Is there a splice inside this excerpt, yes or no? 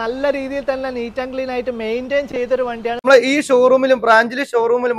yes